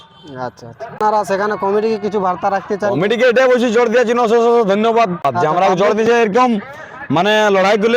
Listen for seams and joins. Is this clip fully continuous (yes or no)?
no